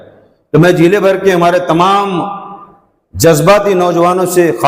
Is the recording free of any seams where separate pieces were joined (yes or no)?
yes